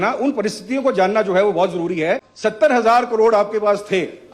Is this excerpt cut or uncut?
cut